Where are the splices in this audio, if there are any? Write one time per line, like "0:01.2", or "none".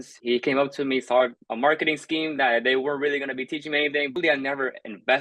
0:01.4
0:04.1